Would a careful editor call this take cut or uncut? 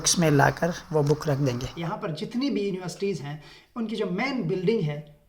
cut